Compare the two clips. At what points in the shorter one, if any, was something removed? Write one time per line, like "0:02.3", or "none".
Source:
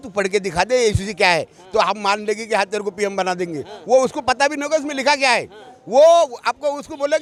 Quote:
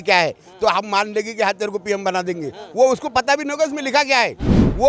none